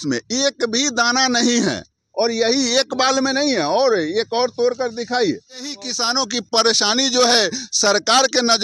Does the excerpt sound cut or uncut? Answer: cut